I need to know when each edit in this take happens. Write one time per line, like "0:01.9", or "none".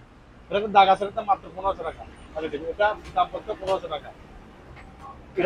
none